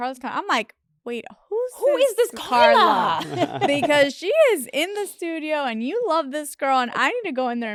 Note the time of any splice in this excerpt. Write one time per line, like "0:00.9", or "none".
none